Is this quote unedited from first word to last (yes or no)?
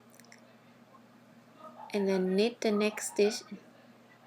no